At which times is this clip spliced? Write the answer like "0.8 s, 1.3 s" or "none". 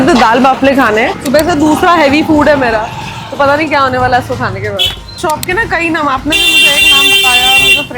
1.2 s, 5.1 s